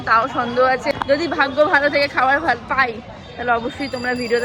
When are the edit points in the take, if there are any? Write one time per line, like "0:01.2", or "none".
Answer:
0:00.9